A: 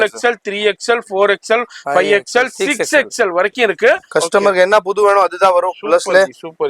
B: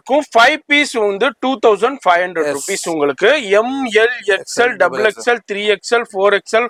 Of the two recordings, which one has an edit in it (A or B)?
A